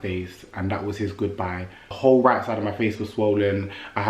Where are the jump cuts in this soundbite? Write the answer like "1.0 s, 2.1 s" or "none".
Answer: 1.8 s

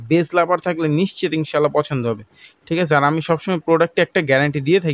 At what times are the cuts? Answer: none

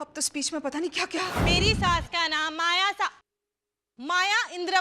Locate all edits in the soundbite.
1.4 s

